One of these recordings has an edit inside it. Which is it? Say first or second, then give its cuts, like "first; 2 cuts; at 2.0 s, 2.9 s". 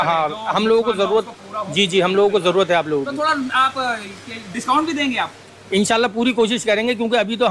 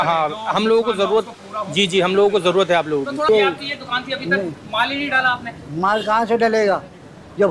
second; 1 cut; at 3.3 s